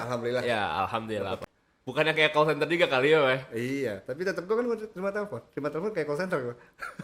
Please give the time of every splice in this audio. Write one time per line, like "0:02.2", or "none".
0:01.5